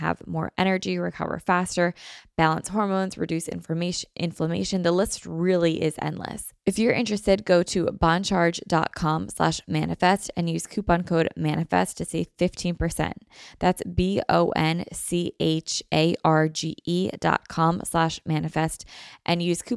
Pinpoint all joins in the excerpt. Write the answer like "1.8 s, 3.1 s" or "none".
6.5 s

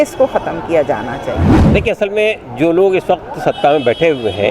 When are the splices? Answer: 1.6 s

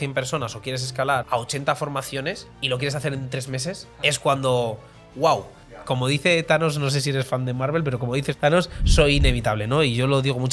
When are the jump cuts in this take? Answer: 1.2 s, 2.5 s, 3.9 s, 5.8 s, 8.3 s

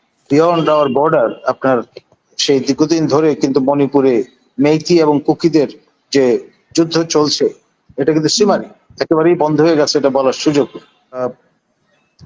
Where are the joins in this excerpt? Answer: 11.2 s

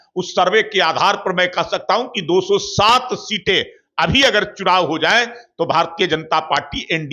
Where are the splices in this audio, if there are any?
none

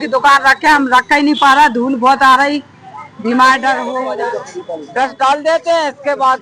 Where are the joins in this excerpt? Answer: 4.0 s

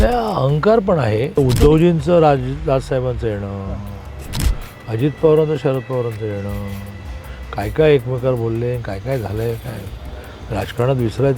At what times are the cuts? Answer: 1.4 s

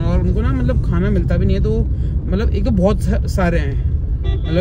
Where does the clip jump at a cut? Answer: none

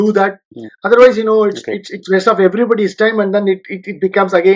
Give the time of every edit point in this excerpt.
none

